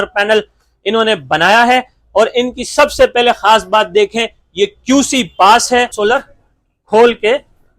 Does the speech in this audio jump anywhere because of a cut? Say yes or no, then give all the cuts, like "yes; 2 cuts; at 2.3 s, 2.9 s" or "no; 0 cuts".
yes; 1 cut; at 5.9 s